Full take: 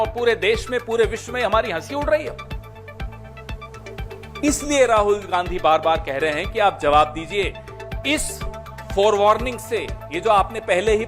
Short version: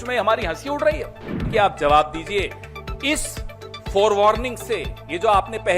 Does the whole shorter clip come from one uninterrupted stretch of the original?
no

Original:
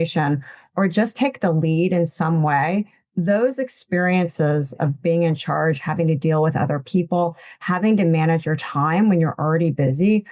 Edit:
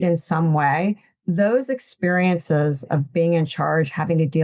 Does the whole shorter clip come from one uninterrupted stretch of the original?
yes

